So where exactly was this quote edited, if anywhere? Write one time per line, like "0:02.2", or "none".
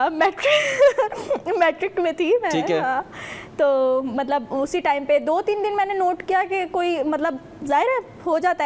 none